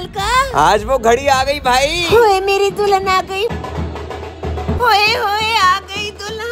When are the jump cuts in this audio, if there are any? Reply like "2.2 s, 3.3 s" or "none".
3.5 s